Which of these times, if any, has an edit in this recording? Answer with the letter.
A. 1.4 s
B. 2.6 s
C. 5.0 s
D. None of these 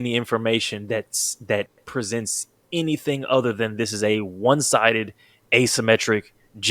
B